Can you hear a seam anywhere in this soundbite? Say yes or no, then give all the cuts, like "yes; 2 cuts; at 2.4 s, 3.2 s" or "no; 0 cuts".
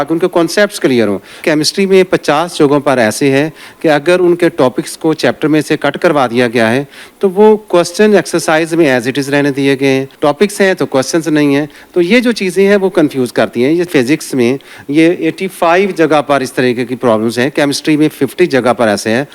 yes; 3 cuts; at 1.4 s, 10.1 s, 13.9 s